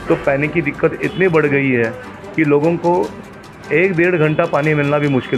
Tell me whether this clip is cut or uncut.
uncut